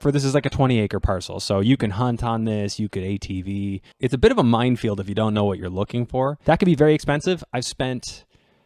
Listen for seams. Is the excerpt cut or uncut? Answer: cut